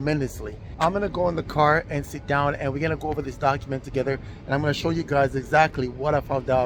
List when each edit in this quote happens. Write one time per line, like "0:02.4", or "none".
none